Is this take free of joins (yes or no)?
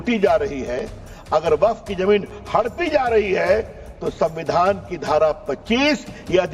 yes